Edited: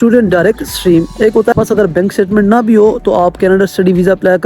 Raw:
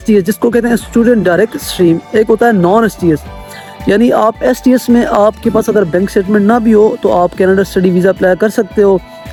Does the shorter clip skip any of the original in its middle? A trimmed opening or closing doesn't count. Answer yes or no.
yes